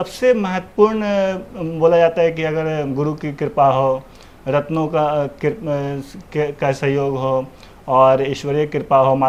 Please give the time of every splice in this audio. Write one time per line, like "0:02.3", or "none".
none